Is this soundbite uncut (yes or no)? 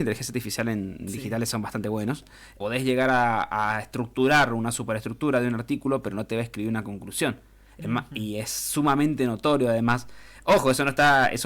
no